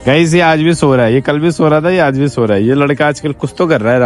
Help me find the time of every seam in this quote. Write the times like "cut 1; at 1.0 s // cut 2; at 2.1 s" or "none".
none